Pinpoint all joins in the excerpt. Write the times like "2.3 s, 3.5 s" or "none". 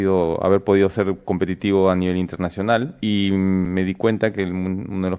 2.9 s, 3.7 s